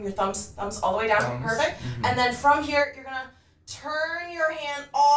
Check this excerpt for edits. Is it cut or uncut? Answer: uncut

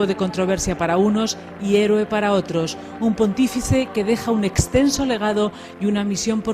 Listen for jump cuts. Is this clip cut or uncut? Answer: cut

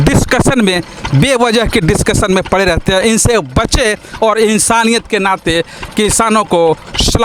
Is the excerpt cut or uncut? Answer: uncut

